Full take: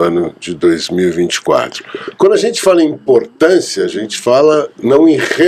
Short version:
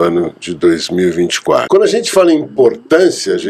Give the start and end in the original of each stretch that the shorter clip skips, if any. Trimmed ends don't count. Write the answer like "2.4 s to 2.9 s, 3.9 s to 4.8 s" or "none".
1.7 s to 2.2 s